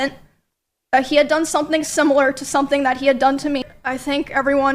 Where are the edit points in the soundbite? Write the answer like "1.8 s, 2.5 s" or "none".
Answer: 3.7 s